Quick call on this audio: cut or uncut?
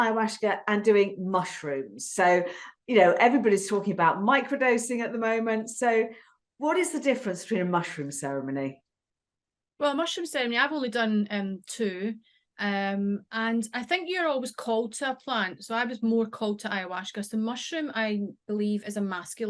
uncut